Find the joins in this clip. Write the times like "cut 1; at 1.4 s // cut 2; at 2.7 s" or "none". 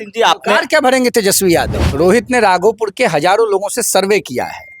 cut 1; at 1.8 s